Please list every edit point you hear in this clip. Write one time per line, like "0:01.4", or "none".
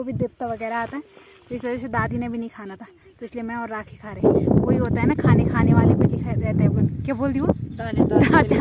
none